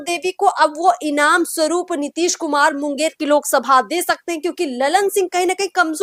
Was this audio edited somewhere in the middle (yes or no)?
no